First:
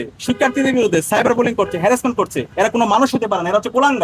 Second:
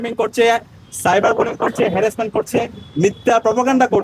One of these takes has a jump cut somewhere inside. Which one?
first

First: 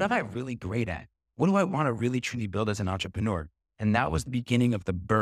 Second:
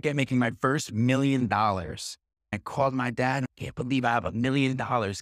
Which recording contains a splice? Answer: second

